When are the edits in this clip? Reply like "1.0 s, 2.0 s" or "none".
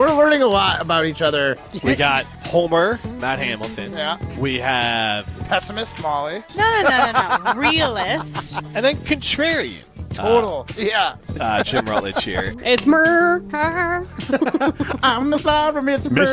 none